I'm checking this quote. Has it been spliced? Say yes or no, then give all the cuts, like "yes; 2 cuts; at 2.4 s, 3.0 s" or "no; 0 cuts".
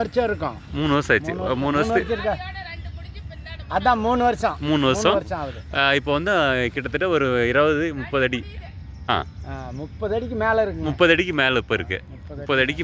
no; 0 cuts